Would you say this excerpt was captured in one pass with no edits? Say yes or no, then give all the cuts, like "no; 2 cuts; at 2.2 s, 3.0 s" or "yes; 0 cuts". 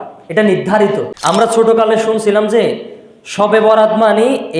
no; 1 cut; at 1.1 s